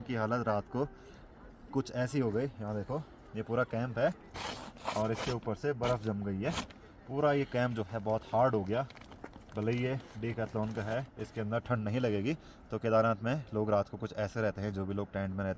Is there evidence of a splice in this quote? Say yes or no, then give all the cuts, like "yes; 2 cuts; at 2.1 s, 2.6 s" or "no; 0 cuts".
no; 0 cuts